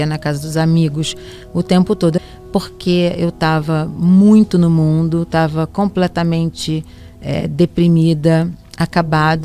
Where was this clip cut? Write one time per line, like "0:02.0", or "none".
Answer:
0:02.2

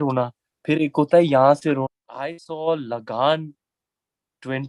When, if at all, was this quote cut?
0:01.9

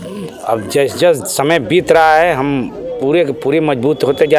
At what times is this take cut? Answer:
none

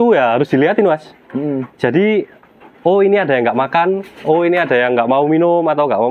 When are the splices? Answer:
none

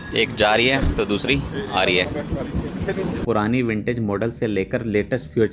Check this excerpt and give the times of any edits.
0:03.2

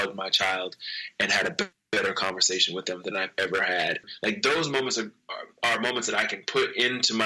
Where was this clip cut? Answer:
0:04.1

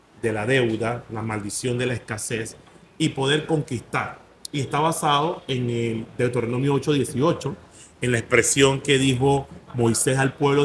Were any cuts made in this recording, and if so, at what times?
none

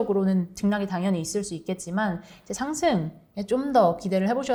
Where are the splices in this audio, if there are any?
none

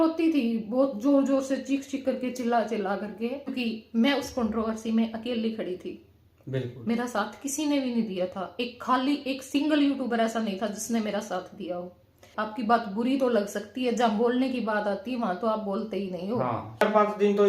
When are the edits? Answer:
0:03.5
0:12.3
0:16.8

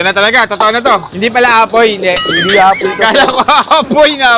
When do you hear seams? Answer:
0:01.1

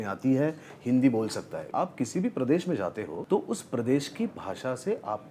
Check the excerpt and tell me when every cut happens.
0:01.6
0:03.2

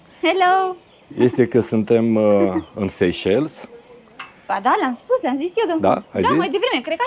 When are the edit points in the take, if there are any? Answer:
none

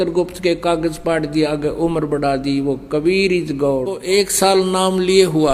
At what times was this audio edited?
0:03.9

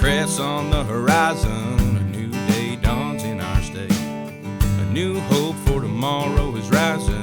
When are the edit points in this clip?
none

